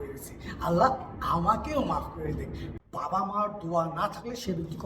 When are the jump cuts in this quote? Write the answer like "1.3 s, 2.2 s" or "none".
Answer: 2.6 s